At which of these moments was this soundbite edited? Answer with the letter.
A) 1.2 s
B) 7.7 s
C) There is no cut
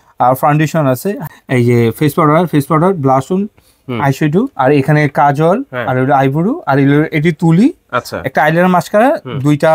A